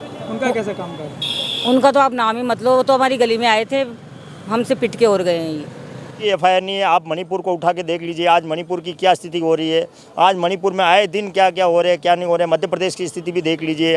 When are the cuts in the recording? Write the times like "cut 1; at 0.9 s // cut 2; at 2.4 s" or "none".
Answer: cut 1; at 6.2 s